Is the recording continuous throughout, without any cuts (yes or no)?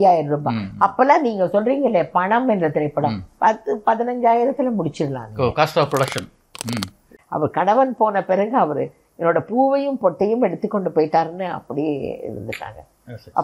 no